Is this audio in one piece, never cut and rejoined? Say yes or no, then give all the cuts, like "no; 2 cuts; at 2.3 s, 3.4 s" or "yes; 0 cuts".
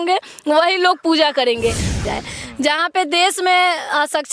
no; 1 cut; at 2.0 s